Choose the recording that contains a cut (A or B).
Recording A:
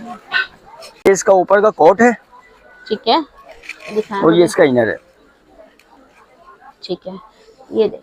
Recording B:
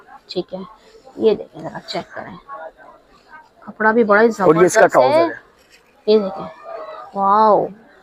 A